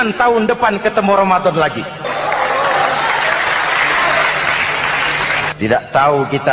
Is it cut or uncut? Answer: cut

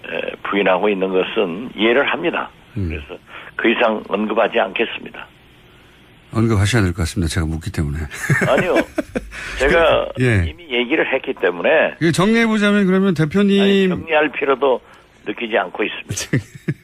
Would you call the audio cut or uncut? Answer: uncut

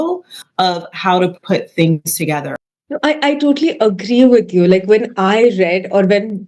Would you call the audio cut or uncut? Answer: cut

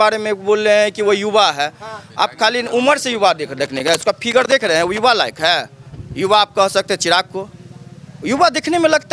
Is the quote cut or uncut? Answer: uncut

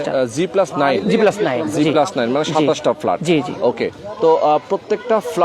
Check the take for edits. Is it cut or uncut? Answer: uncut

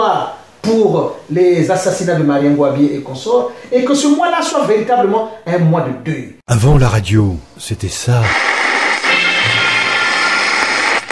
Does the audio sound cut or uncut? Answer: cut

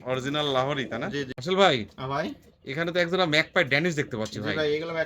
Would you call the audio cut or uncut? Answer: cut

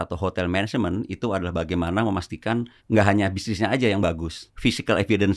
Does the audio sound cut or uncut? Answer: cut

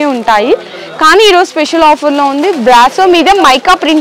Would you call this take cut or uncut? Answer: uncut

